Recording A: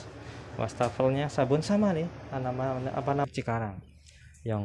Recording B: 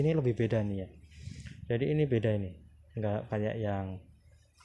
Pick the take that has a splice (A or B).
A